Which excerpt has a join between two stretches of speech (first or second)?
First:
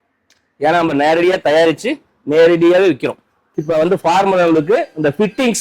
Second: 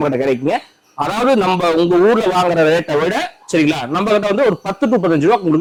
first